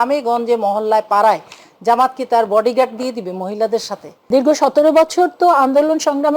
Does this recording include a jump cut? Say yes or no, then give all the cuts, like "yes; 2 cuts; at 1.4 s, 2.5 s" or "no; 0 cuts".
yes; 1 cut; at 4.3 s